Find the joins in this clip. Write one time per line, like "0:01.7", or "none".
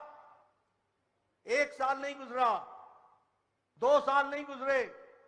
none